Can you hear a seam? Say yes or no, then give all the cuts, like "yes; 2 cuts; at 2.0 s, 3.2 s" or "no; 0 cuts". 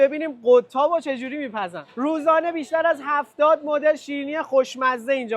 yes; 1 cut; at 1.8 s